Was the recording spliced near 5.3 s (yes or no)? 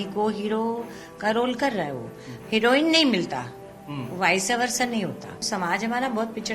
yes